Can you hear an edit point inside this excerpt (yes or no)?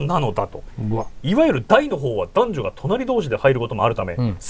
no